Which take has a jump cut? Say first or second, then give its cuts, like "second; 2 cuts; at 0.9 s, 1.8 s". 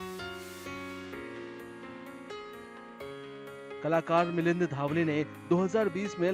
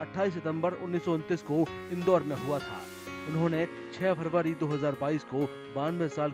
first; 1 cut; at 0.9 s